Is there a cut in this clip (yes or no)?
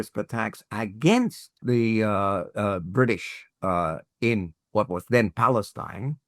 yes